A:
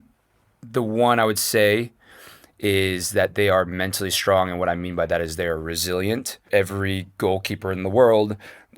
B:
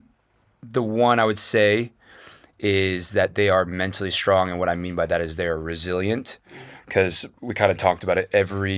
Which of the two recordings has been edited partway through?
A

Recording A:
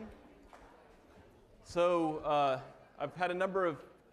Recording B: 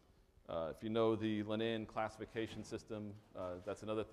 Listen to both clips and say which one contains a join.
B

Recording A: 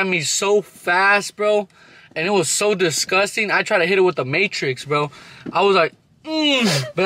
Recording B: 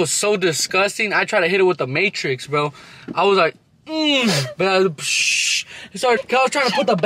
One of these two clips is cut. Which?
B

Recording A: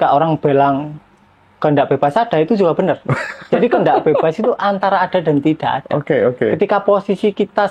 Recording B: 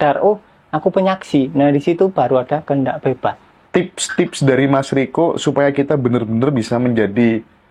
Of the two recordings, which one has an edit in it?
B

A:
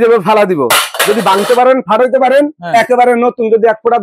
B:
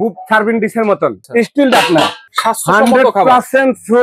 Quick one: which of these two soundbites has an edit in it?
B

